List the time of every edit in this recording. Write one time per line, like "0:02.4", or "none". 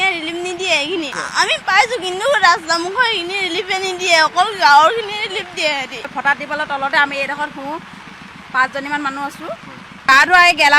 0:01.2
0:06.1
0:10.1